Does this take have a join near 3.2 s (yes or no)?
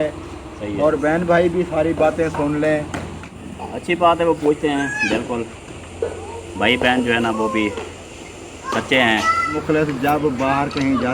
yes